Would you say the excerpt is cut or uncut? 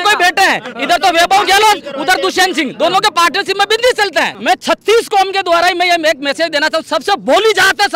cut